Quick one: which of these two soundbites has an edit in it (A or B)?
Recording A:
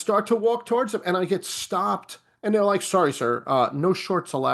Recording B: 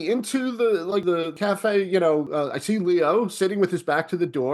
B